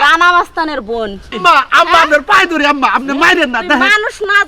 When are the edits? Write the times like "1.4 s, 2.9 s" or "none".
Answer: 1.4 s

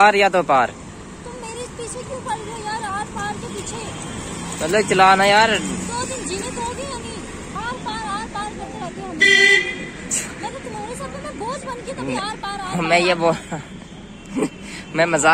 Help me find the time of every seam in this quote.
0.9 s, 7.5 s

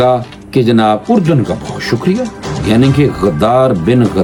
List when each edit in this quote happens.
none

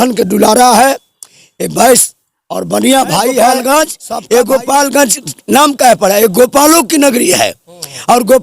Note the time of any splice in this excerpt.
3.6 s

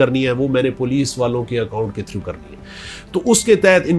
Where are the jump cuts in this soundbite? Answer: none

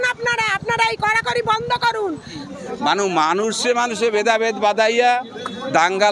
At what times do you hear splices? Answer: 2.3 s

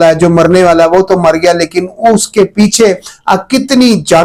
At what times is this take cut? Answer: none

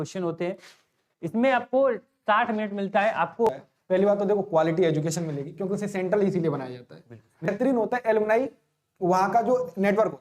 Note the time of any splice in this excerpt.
3.5 s, 7.5 s

